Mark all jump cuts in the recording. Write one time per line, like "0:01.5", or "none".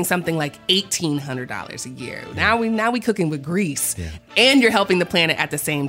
0:04.2